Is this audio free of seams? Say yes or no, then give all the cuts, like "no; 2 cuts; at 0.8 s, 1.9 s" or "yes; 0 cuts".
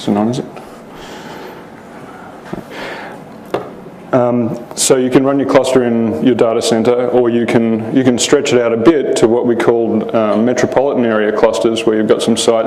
no; 1 cut; at 2.7 s